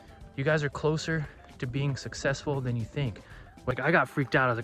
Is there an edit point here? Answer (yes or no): yes